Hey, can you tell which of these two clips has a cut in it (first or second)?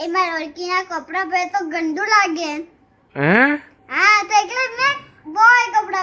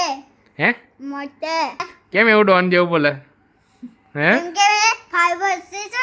second